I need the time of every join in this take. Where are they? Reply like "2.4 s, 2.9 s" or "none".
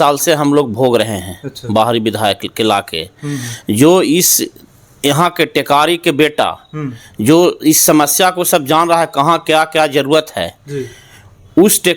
none